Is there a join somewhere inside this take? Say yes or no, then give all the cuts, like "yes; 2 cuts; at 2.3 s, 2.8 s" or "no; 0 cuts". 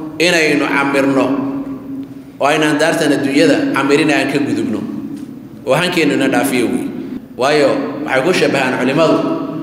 yes; 1 cut; at 7.2 s